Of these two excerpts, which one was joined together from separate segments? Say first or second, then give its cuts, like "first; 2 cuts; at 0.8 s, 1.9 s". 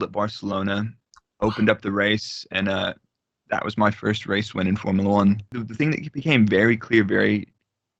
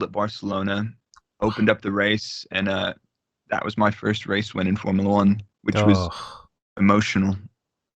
first; 1 cut; at 5.5 s